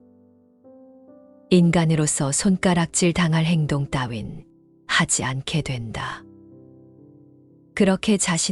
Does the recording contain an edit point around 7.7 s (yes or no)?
yes